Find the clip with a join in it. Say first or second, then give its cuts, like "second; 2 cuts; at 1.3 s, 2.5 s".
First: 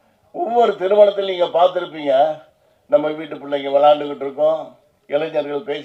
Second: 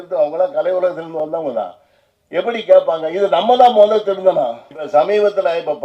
second; 1 cut; at 4.7 s